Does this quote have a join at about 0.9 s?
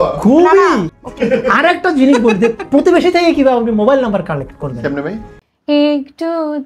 yes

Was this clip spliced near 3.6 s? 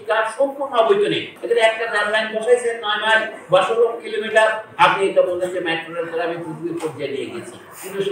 no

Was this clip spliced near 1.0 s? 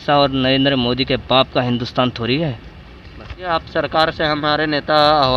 no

